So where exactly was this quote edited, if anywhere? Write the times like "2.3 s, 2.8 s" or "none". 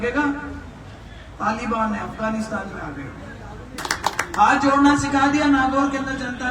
3.8 s